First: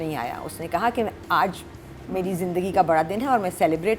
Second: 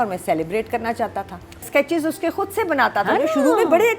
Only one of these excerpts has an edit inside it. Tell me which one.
second; 1 cut; at 1.7 s

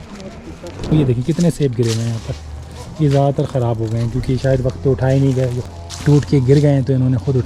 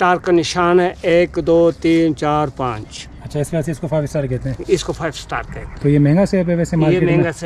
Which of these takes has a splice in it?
first; 2 cuts; at 0.9 s, 5.6 s

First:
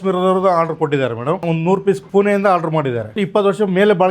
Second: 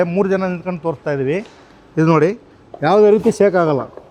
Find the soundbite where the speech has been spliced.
first; 1 cut; at 3.2 s

